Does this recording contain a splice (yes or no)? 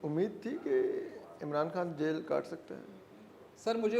no